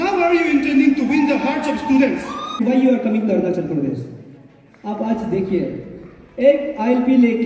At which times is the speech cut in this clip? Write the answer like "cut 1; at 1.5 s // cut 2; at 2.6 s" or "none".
cut 1; at 2.6 s